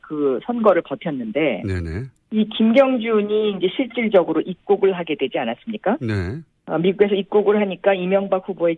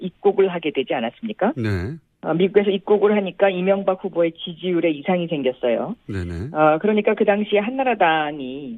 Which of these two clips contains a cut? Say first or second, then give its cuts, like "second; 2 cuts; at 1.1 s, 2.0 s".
first; 1 cut; at 1.5 s